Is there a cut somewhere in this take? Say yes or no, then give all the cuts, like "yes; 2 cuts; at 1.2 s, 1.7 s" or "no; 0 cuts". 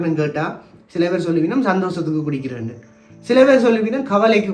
no; 0 cuts